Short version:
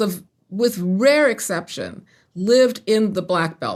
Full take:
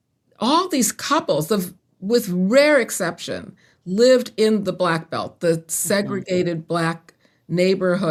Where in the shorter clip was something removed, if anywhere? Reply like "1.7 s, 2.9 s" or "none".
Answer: none